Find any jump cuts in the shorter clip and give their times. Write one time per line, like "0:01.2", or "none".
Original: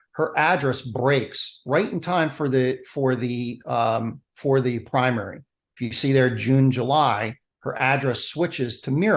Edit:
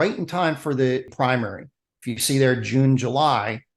0:01.1